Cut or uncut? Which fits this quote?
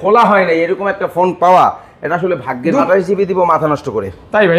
cut